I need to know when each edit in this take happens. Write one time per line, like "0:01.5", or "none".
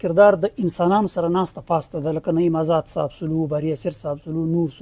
none